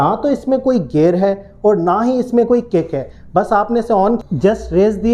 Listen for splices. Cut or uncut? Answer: cut